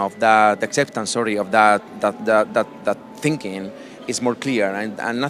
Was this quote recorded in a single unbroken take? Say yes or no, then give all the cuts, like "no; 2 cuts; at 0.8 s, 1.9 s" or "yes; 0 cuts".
yes; 0 cuts